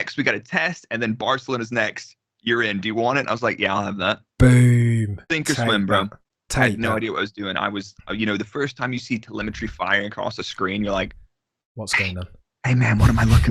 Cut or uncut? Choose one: uncut